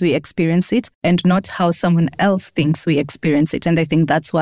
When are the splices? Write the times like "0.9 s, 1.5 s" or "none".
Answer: none